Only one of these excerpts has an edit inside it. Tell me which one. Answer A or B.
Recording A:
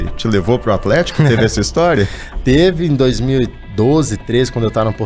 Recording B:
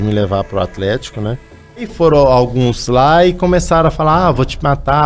B